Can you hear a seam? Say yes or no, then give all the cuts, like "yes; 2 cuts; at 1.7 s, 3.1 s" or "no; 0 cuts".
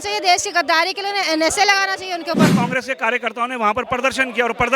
yes; 1 cut; at 2.5 s